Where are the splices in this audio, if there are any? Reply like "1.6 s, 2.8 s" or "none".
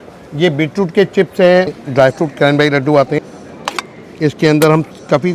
1.8 s, 3.2 s